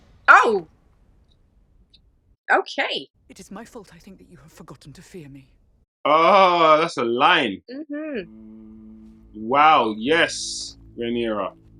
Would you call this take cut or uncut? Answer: uncut